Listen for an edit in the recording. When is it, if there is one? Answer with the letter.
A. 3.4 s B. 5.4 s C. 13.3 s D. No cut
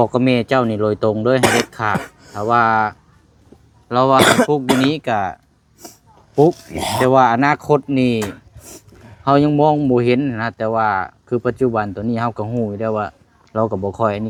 D